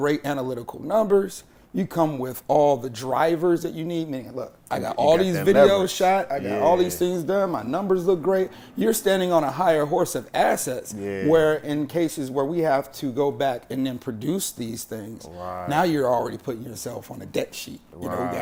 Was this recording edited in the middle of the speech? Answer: no; 0 cuts

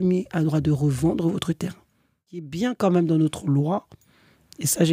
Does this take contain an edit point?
yes; 1 cut; at 2.5 s

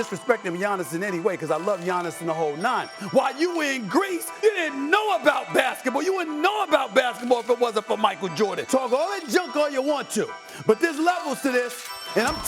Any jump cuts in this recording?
yes; 3 cuts; at 3.0 s, 4.3 s, 8.6 s

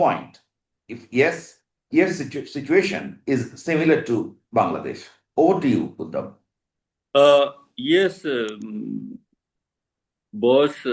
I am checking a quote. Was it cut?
no; 0 cuts

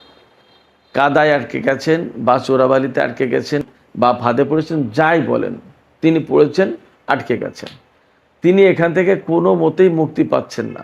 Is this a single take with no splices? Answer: no; 1 cut; at 3.6 s

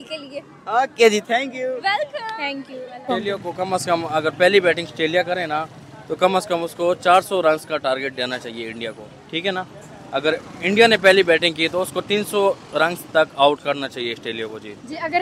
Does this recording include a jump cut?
no; 0 cuts

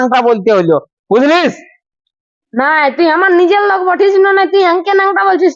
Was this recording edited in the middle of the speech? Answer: no; 0 cuts

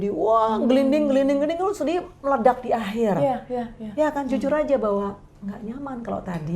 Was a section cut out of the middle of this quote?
no; 0 cuts

